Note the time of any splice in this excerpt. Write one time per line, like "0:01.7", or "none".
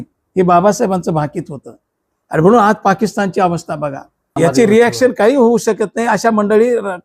0:04.2